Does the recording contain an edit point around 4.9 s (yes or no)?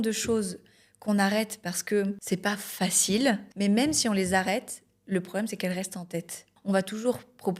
no